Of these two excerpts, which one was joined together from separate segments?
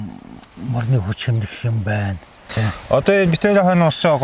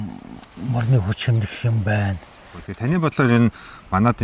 second; 1 cut; at 2.5 s

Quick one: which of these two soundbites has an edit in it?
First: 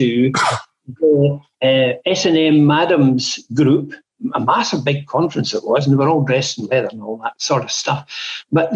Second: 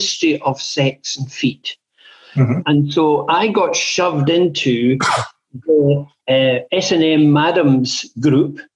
second; 1 cut; at 2.6 s

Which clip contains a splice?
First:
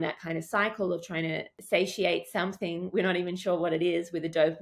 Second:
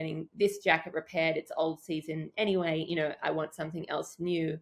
first; 1 cut; at 1.5 s

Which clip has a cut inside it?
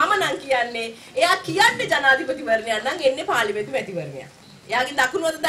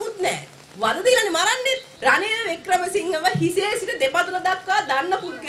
second; 1 cut; at 1.9 s

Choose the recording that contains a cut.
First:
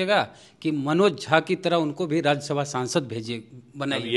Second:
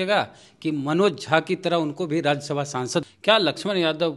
second; 1 cut; at 3.1 s

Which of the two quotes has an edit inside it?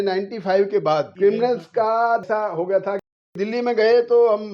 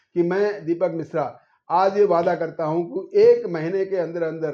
first; 3 cuts; at 1.1 s, 2.2 s, 3.3 s

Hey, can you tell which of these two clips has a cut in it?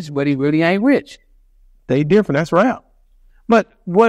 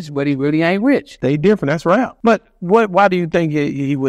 second; 2 cuts; at 1.1 s, 2.1 s

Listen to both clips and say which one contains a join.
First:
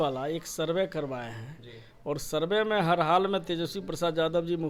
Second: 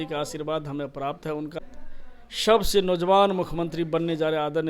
second; 1 cut; at 1.6 s

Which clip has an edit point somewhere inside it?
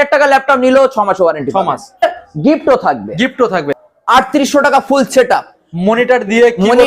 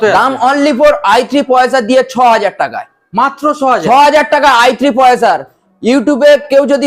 first; 2 cuts; at 2.0 s, 3.7 s

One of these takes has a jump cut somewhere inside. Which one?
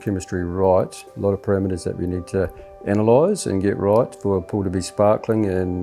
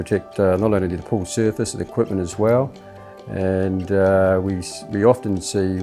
first; 1 cut; at 1.0 s

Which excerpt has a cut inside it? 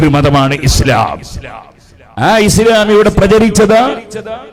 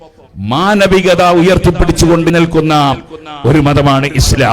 second; 1 cut; at 2.3 s

